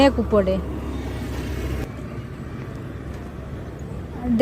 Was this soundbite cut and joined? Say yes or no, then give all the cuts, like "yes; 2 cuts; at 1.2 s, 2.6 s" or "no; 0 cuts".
yes; 1 cut; at 1.7 s